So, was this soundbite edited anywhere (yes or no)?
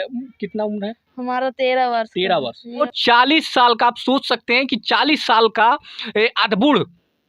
yes